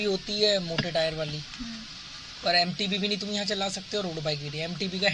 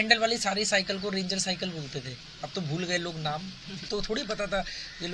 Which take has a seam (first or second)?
second